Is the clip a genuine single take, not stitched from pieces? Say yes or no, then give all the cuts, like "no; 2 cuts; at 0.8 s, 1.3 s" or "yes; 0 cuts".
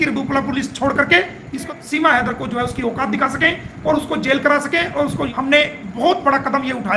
no; 2 cuts; at 1.7 s, 5.3 s